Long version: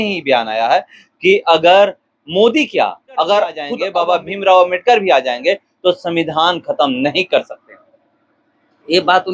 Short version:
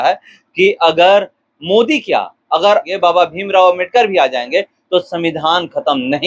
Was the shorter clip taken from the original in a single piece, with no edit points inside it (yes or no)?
no